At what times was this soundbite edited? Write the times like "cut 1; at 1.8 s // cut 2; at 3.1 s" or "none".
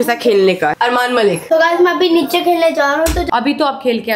cut 1; at 1.0 s // cut 2; at 3.3 s